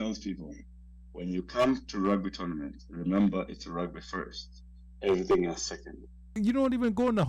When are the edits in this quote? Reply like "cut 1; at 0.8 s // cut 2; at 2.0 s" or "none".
cut 1; at 6.4 s